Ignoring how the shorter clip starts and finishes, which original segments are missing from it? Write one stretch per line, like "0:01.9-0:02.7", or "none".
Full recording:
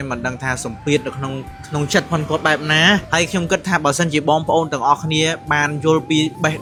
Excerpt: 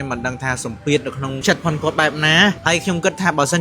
0:01.4-0:01.9